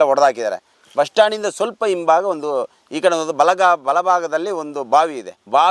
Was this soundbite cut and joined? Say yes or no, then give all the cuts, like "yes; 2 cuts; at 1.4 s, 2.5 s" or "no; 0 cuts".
no; 0 cuts